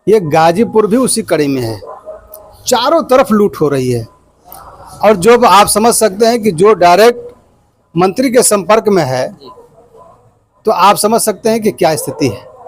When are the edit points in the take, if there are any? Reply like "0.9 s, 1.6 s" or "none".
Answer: none

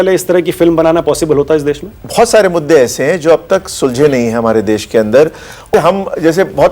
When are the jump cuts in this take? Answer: 1.9 s, 5.7 s

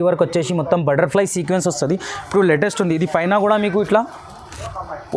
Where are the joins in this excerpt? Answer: none

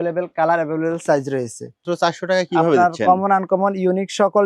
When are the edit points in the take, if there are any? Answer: 1.9 s

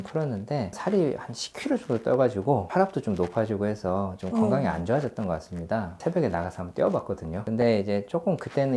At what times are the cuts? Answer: 0.8 s, 2.7 s, 5.9 s, 7.4 s

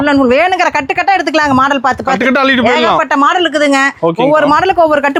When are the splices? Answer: none

